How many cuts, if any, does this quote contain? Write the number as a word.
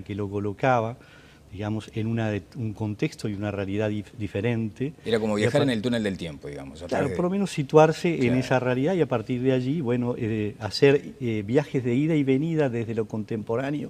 one